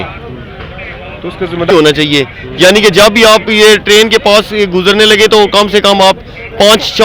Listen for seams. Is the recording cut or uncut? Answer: cut